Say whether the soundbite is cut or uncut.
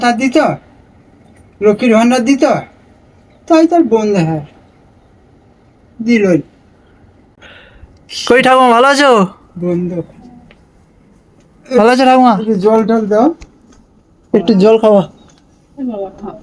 uncut